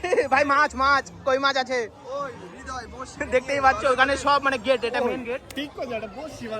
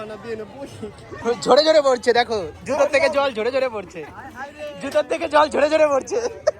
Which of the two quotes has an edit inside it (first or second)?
second